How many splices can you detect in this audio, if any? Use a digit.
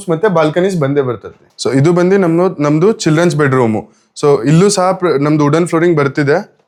0